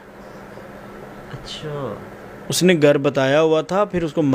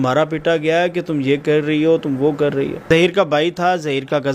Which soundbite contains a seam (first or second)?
second